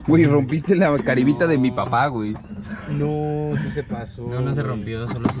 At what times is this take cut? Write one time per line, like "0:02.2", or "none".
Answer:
none